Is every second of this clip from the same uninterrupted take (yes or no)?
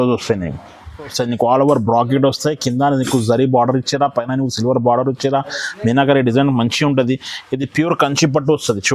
no